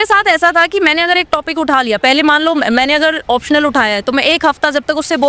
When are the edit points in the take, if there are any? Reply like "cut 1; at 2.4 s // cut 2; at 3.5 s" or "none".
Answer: none